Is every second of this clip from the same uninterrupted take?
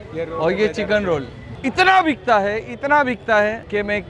no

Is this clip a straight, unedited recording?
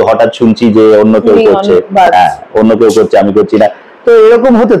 yes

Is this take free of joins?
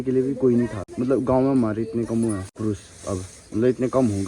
no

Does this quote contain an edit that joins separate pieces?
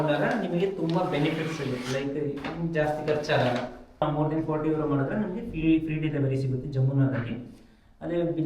yes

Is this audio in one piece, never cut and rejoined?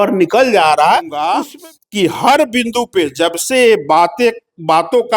no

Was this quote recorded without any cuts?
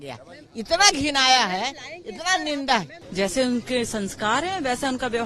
yes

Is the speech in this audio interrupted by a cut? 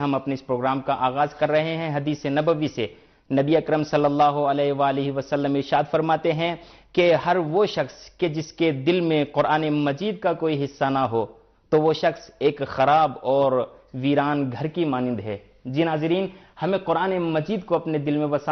yes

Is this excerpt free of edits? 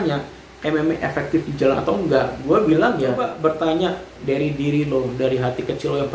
no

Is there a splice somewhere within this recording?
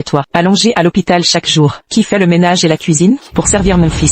no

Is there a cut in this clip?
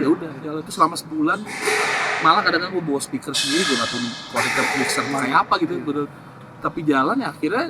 no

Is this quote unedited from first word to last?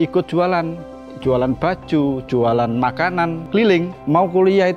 no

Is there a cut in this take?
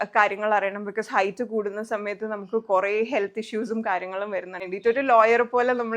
yes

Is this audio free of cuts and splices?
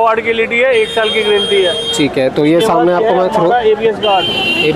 yes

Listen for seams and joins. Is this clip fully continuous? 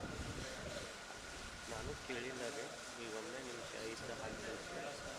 yes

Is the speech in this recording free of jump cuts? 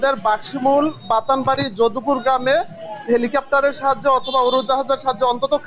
yes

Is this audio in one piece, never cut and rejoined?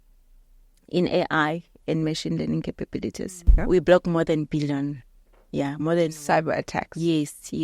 no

